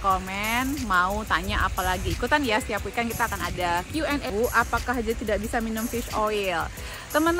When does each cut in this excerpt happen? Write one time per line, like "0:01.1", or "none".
0:04.3